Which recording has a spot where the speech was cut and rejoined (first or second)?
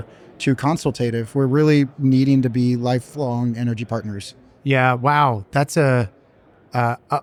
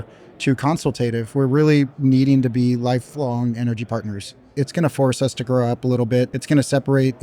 second